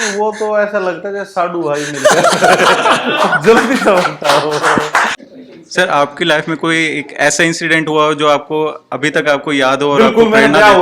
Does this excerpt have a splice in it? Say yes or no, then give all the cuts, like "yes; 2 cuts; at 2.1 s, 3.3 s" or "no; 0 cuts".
yes; 1 cut; at 5.2 s